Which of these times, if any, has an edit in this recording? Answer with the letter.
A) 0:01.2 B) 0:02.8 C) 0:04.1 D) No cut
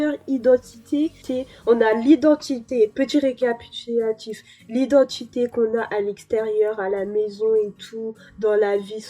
A